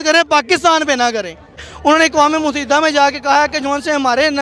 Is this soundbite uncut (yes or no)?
no